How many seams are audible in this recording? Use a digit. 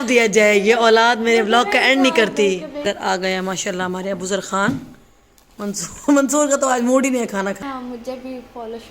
2